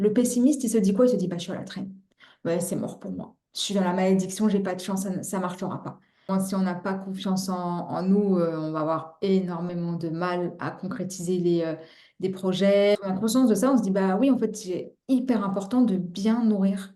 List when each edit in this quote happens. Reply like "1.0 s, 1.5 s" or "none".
6.3 s, 13.0 s